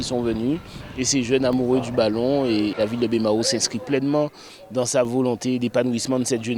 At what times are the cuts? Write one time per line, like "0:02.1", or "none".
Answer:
0:02.8